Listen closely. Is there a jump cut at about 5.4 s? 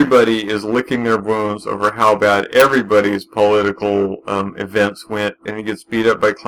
yes; 1 cut; at 5.4 s

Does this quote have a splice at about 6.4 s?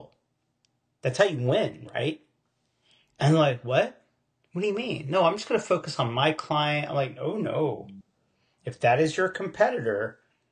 no; 0 cuts

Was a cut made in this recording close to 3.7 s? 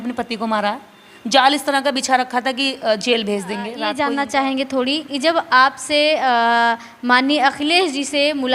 yes; 1 cut; at 3.7 s

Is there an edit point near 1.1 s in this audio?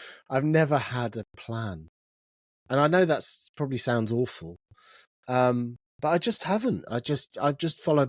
no; 0 cuts

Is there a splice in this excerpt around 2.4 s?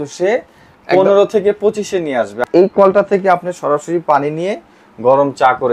yes; 1 cut; at 2.4 s

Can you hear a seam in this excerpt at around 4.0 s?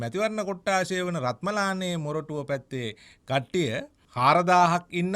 yes; 1 cut; at 4.0 s

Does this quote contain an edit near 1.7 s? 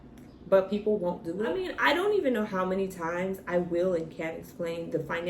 yes; 1 cut; at 1.7 s

